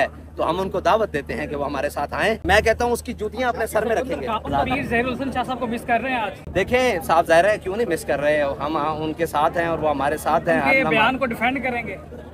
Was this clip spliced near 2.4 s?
yes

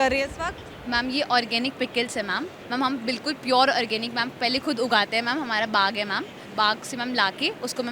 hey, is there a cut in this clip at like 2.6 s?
yes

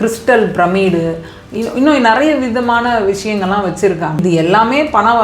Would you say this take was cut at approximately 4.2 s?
yes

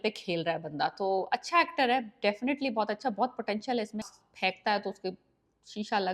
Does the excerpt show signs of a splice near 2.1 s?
no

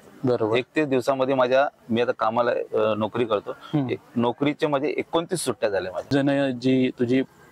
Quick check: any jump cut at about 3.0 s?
no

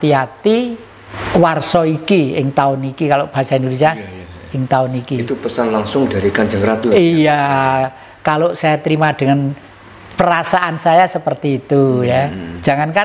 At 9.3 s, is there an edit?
no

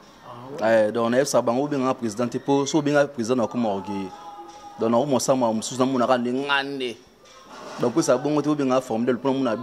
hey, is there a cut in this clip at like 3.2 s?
no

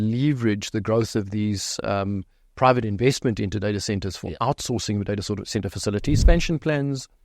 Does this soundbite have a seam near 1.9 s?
no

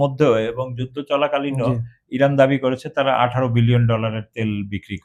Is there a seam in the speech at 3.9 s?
no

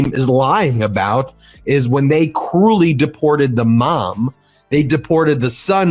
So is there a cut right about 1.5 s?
no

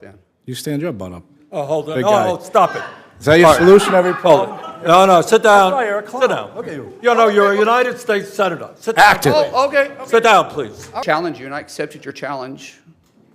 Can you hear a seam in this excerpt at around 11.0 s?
yes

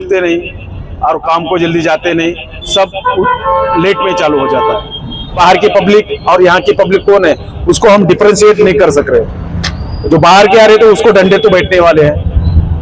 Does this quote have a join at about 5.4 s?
yes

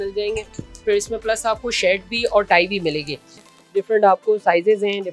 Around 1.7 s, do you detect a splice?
no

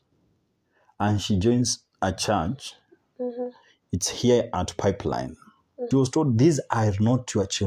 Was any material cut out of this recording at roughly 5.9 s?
yes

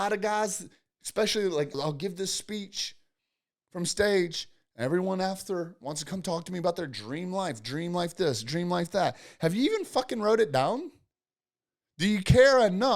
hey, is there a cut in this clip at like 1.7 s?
yes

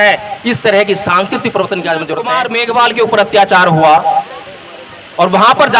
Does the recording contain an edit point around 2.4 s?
yes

